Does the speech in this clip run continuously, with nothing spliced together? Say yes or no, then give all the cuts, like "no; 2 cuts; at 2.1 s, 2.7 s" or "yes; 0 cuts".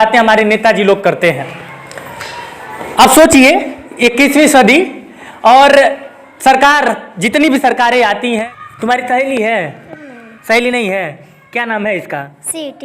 no; 1 cut; at 8.4 s